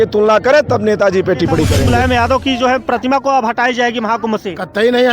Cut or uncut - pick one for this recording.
cut